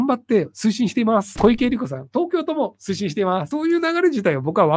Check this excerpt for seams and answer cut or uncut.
cut